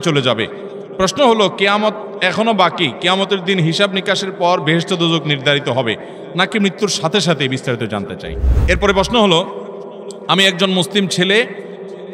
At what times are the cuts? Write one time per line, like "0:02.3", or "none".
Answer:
0:08.6